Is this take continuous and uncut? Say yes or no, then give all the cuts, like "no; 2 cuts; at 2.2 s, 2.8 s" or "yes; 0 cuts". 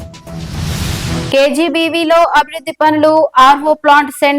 no; 1 cut; at 1.3 s